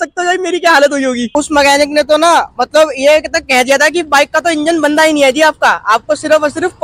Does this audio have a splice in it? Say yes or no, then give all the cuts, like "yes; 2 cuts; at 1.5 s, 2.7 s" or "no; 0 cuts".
yes; 1 cut; at 1.2 s